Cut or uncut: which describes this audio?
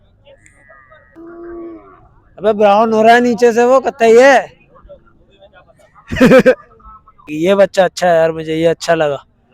cut